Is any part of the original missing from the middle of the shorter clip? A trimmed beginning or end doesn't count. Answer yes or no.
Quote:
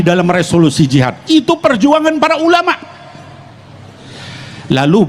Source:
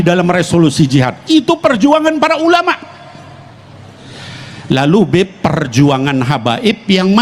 no